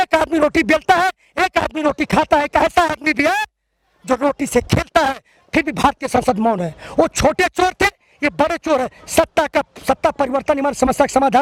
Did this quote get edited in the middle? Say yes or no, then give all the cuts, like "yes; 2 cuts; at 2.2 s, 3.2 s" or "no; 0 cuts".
no; 0 cuts